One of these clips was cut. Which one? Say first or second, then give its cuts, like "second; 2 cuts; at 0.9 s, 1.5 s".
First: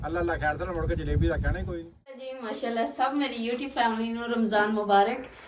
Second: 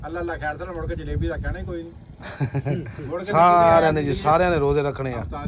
first; 1 cut; at 2.3 s